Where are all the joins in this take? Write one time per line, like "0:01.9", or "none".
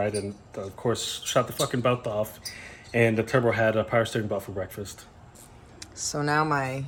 none